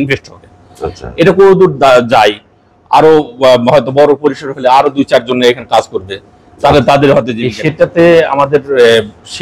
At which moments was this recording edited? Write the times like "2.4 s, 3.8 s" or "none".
7.4 s